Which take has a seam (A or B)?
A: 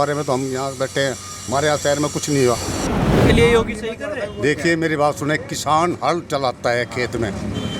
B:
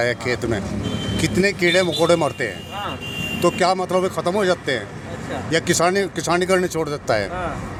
A